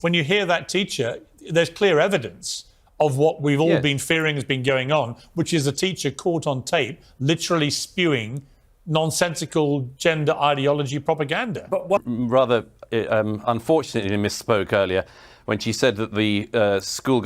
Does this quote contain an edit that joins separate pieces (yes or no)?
yes